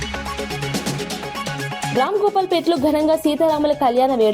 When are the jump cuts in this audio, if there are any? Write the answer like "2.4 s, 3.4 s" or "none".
1.9 s